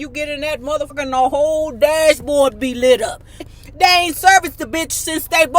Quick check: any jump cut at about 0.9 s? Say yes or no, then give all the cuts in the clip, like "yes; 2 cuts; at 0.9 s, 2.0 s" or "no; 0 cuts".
yes; 2 cuts; at 0.9 s, 3.5 s